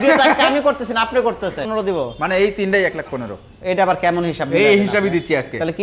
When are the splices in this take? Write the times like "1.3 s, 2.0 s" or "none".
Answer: 1.7 s